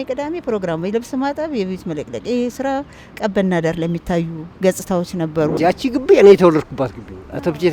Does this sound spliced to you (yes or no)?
yes